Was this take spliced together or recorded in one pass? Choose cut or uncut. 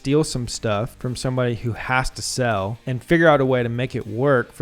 cut